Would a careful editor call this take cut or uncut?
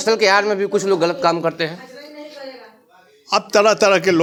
uncut